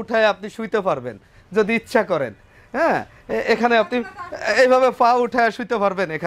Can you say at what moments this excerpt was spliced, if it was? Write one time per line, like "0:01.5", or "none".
none